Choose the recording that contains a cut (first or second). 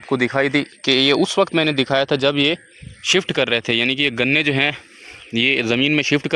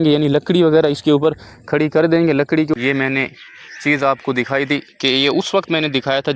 second